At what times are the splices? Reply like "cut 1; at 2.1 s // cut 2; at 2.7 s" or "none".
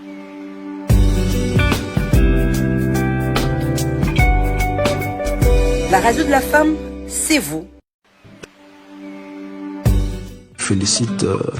cut 1; at 1.0 s